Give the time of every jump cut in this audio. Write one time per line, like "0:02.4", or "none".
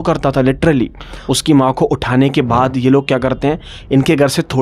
0:01.1